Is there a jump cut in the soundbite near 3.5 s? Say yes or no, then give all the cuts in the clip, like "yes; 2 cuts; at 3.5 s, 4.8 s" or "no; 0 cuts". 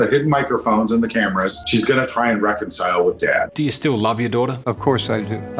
yes; 1 cut; at 3.5 s